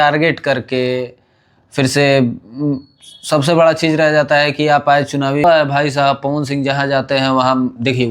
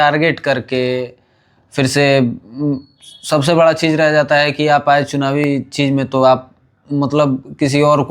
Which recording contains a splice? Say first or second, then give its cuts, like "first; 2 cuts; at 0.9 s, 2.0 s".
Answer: first; 1 cut; at 5.4 s